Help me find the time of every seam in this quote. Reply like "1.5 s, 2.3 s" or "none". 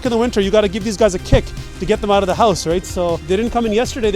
3.2 s